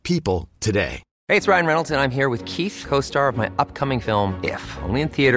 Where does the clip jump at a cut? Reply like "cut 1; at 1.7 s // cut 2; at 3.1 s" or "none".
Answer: cut 1; at 1.1 s